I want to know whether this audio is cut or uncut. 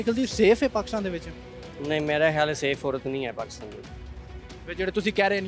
uncut